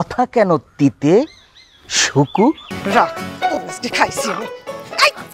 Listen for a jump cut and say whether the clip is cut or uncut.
cut